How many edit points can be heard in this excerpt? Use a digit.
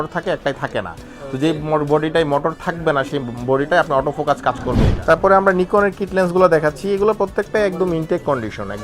1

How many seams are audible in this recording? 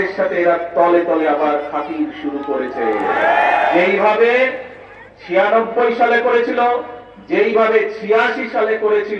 1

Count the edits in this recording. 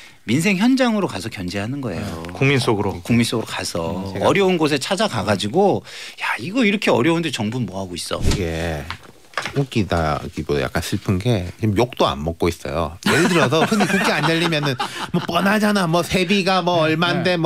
1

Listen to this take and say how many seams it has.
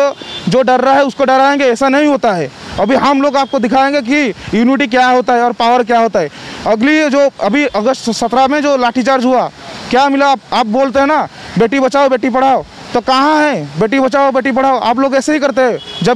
0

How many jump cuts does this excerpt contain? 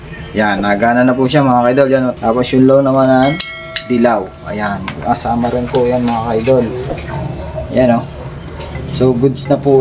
1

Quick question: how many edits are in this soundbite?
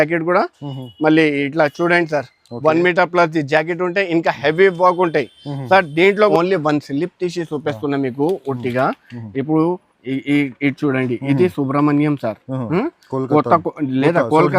1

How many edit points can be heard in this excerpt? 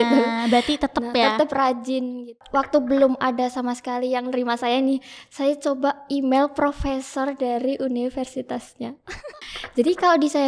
2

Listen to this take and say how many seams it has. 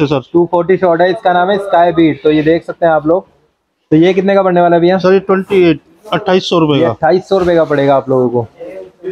0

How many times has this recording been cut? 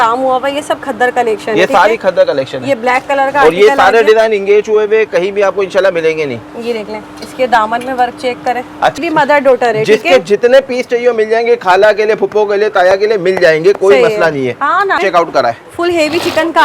2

